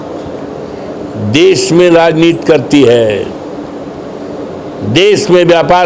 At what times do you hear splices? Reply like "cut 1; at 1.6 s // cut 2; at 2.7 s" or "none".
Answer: none